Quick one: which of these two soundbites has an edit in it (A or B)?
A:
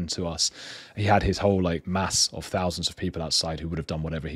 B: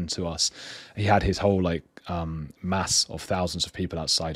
A